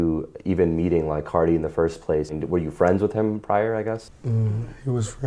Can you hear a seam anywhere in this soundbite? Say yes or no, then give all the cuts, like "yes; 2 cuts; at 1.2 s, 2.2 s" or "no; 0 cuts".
yes; 2 cuts; at 2.3 s, 4.1 s